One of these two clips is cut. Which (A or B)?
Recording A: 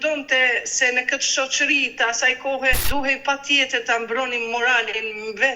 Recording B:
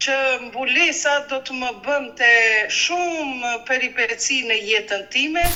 A